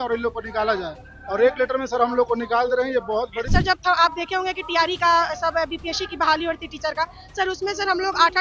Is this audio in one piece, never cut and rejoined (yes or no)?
no